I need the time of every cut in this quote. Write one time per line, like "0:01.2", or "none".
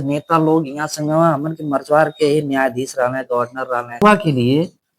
0:04.0